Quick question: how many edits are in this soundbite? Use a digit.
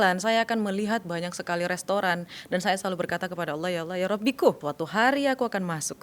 1